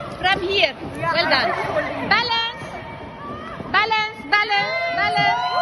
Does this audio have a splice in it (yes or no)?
no